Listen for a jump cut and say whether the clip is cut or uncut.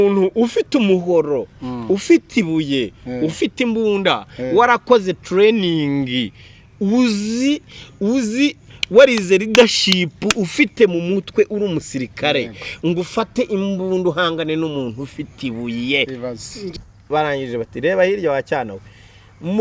cut